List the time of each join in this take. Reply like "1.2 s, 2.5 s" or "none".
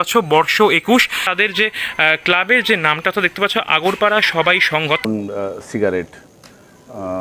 1.3 s, 5.0 s